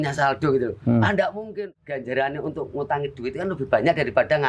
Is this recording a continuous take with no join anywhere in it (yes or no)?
no